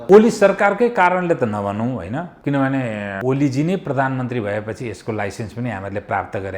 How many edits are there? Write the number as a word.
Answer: two